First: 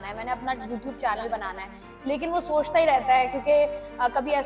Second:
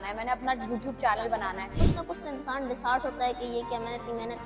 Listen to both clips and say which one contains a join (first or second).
second